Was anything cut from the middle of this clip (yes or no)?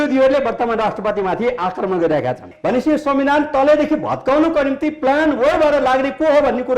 yes